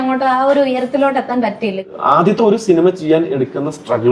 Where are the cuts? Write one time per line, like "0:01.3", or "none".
0:01.9